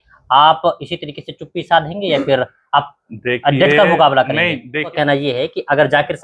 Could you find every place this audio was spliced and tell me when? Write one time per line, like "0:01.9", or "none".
0:04.9